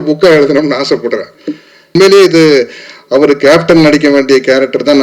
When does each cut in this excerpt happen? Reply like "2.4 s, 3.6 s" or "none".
1.9 s